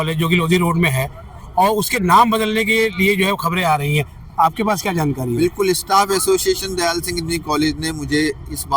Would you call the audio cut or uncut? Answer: uncut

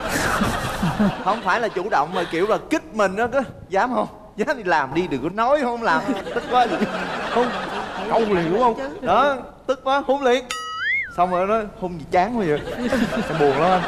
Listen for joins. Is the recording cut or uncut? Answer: uncut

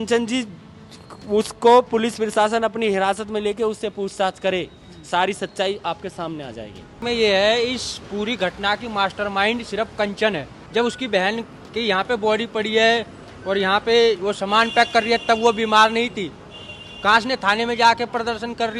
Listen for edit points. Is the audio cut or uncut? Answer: cut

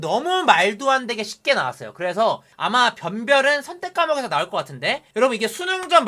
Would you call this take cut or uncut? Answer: cut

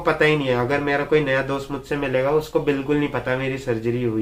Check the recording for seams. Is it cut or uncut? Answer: uncut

